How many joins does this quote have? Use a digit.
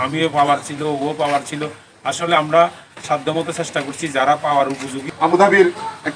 1